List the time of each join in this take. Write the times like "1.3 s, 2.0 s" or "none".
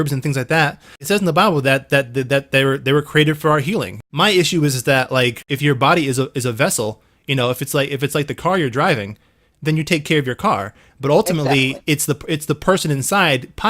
1.0 s, 4.0 s, 5.5 s